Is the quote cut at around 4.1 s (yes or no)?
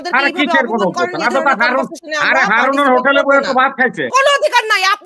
yes